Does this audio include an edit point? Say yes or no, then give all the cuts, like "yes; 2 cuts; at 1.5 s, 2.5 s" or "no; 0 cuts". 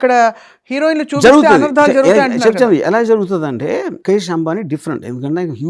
no; 0 cuts